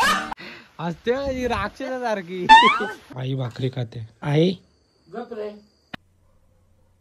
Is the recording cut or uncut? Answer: cut